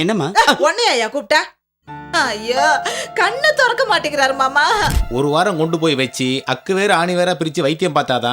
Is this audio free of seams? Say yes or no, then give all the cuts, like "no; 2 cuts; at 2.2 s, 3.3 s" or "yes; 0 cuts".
no; 1 cut; at 5.0 s